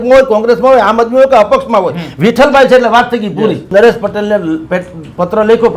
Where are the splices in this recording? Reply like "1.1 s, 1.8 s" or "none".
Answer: 3.7 s